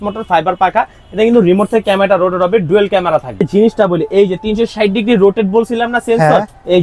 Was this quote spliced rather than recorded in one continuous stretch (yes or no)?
yes